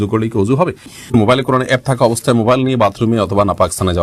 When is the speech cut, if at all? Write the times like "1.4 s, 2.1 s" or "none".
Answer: 1.1 s